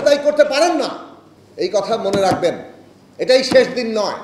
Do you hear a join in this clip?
no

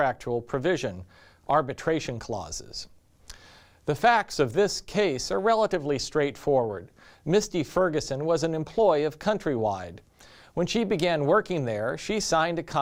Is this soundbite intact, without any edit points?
yes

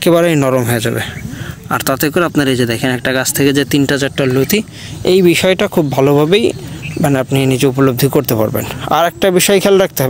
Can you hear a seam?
no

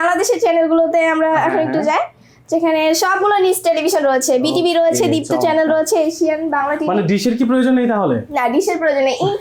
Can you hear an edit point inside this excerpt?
no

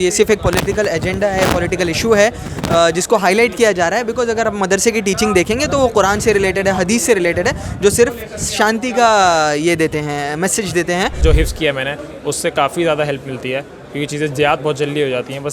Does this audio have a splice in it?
yes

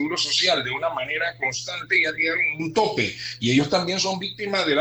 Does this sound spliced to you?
no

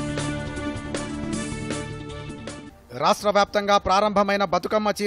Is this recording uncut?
yes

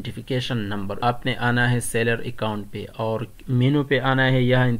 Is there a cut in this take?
yes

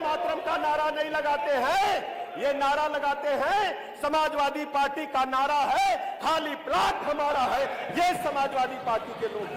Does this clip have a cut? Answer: no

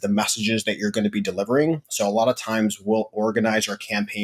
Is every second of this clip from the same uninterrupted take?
yes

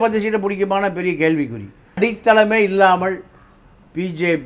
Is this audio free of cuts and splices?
no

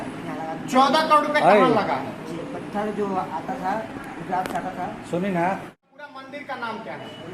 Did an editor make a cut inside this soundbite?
yes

